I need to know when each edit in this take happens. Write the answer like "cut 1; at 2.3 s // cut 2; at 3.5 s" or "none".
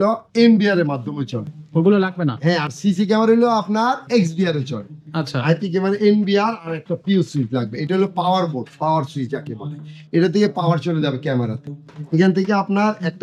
none

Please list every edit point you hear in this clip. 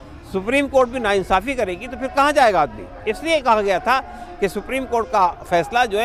none

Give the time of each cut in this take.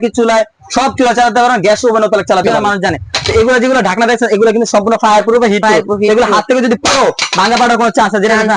cut 1; at 2.5 s

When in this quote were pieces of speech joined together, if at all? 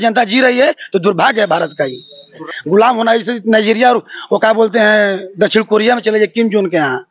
cut 1; at 2.4 s

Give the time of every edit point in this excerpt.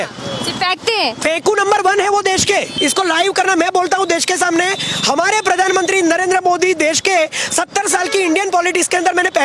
cut 1; at 2.7 s

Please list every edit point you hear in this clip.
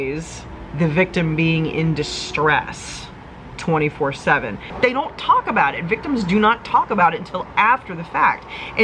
cut 1; at 4.7 s

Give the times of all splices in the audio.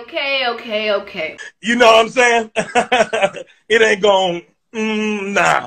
none

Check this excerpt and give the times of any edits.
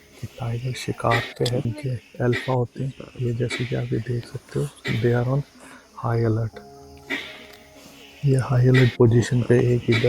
cut 1; at 1.7 s

